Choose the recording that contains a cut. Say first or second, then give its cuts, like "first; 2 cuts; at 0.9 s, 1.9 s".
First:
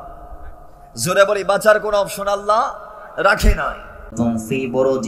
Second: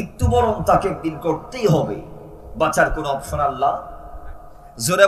first; 1 cut; at 4.1 s